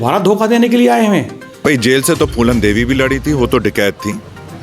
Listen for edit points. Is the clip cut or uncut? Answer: cut